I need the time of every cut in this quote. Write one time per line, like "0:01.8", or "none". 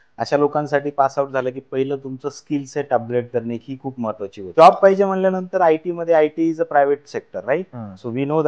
0:04.5